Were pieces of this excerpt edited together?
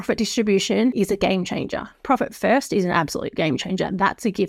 yes; 1 cut; at 0.9 s

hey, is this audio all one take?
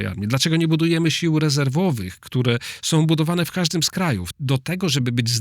no; 1 cut; at 4.3 s

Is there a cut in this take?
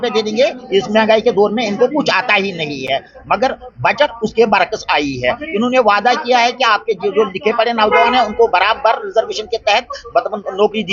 no; 0 cuts

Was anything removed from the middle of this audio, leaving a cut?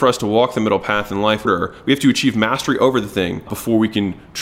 yes; 2 cuts; at 1.5 s, 3.5 s

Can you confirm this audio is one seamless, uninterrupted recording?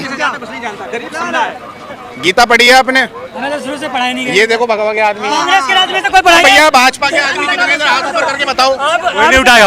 yes; 0 cuts

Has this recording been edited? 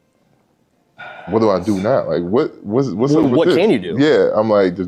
no; 0 cuts

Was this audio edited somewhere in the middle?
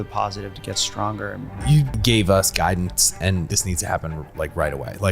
yes; 2 cuts; at 1.8 s, 3.5 s

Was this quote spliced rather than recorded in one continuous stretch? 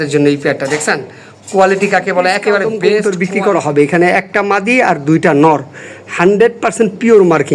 yes; 1 cut; at 3.0 s

